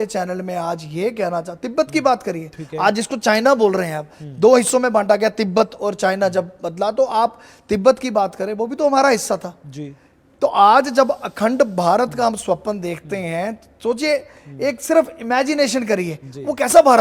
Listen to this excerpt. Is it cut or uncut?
uncut